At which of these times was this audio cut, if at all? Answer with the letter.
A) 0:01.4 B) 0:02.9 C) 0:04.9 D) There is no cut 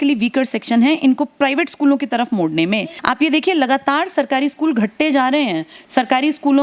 B